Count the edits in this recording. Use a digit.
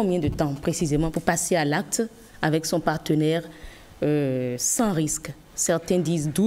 1